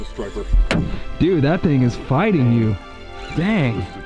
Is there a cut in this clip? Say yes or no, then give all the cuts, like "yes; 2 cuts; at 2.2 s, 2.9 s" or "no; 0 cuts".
yes; 1 cut; at 1.0 s